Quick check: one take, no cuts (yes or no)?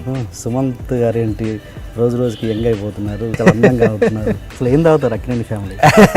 no